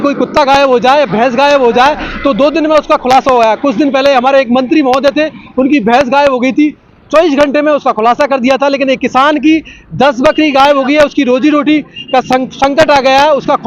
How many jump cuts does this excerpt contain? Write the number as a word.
zero